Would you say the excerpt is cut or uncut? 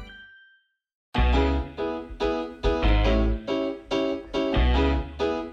cut